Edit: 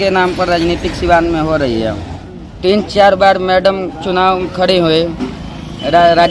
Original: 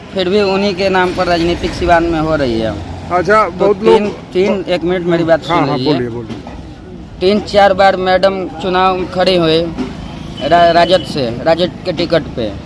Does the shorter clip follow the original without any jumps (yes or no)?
no